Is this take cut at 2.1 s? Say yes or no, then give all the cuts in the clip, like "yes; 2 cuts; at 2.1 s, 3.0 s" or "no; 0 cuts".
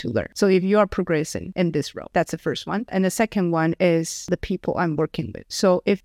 yes; 1 cut; at 2.1 s